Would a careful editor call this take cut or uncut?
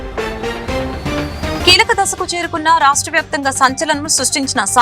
cut